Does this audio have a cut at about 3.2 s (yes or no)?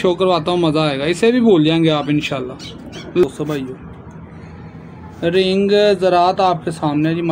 yes